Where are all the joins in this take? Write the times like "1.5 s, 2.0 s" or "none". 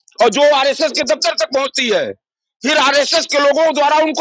none